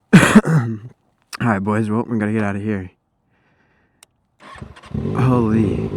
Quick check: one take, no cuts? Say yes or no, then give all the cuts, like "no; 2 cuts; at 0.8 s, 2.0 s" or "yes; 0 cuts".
yes; 0 cuts